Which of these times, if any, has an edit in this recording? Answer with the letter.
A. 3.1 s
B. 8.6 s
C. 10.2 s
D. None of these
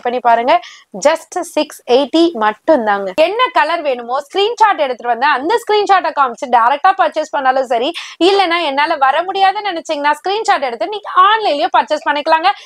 A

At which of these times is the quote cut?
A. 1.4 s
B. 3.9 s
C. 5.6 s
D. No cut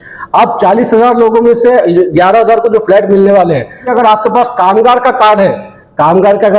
B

